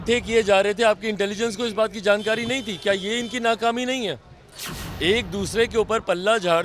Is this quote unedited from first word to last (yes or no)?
yes